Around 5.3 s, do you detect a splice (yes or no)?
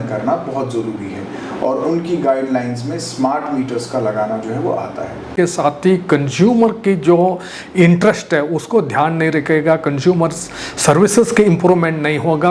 yes